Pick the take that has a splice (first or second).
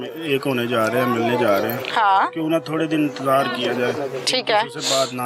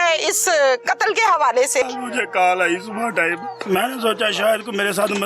second